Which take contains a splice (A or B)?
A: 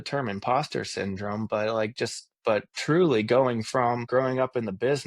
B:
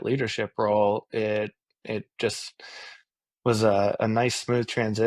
A